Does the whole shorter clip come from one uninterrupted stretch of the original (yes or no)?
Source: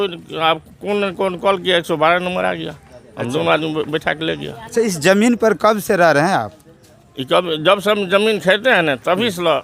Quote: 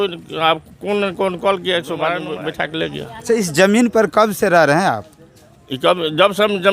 no